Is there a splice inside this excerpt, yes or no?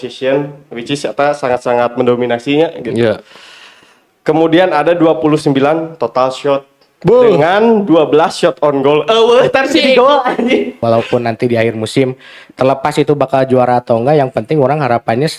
yes